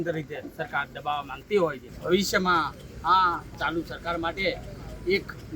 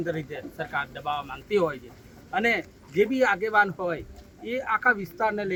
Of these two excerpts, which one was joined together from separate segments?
first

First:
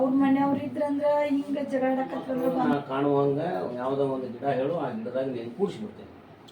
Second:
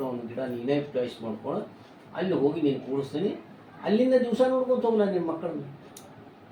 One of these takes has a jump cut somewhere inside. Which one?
first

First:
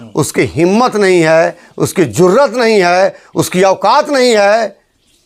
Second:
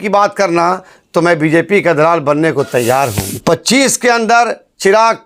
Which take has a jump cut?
second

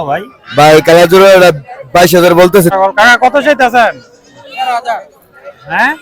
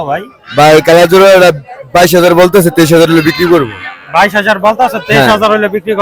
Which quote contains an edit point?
first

